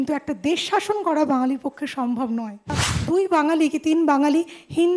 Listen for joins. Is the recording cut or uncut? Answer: cut